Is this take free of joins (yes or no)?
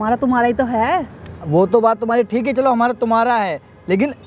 yes